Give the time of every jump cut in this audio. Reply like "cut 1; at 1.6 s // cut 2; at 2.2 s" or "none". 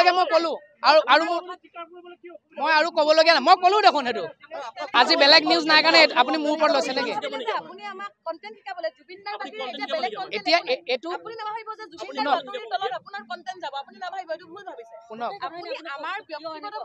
cut 1; at 4.9 s